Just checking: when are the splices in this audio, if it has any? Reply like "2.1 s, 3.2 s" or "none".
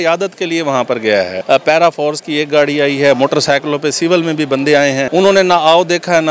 1.4 s, 5.1 s